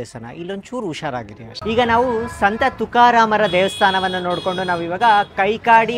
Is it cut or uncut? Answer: cut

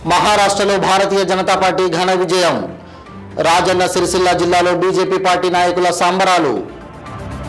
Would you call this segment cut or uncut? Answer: uncut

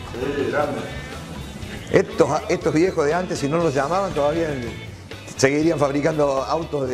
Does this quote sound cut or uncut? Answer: uncut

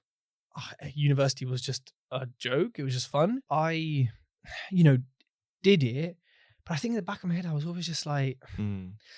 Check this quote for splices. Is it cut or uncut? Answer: cut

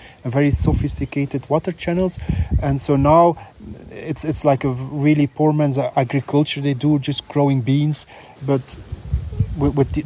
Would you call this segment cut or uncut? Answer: cut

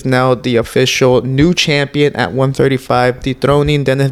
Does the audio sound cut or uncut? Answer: uncut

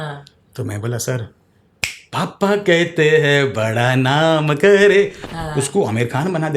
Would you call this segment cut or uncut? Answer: cut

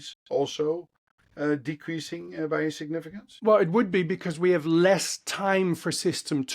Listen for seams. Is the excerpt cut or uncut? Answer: cut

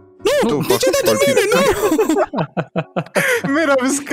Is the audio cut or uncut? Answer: uncut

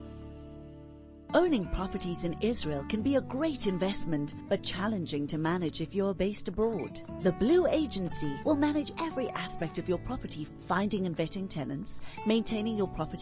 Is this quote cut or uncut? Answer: cut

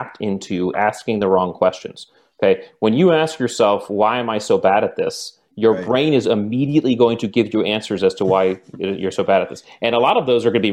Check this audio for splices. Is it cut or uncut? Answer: uncut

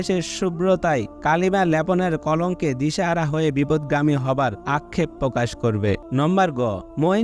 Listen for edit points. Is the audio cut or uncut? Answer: cut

